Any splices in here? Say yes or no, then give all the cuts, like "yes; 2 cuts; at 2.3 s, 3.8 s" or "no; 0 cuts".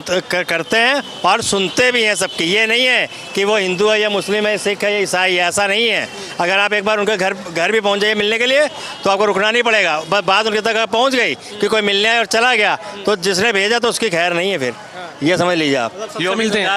no; 0 cuts